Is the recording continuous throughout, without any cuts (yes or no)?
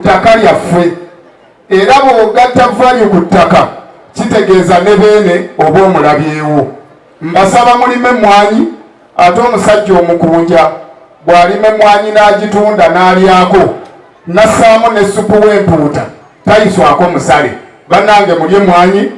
yes